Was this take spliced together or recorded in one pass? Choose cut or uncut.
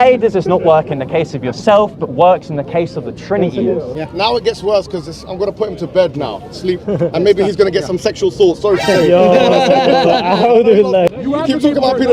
cut